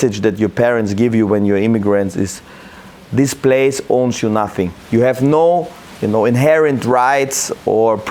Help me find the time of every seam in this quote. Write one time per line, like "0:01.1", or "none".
none